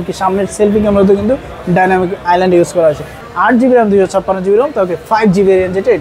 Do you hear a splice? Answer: yes; 1 cut; at 3.2 s

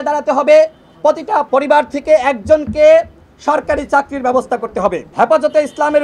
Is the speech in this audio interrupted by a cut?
yes; 2 cuts; at 1.5 s, 5.0 s

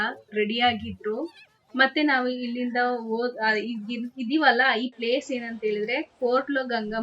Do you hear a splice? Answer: no; 0 cuts

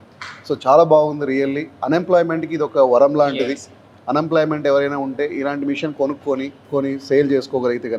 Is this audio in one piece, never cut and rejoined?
no; 1 cut; at 6.7 s

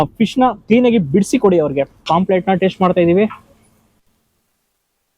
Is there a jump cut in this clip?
yes; 1 cut; at 2.0 s

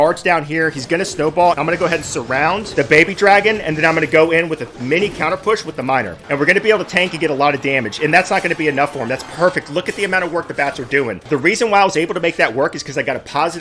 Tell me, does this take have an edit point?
no; 0 cuts

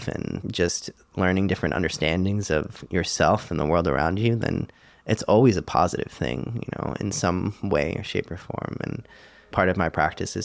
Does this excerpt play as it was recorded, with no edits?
no; 1 cut; at 9.5 s

